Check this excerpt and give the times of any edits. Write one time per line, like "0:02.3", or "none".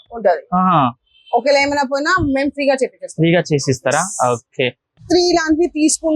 0:04.9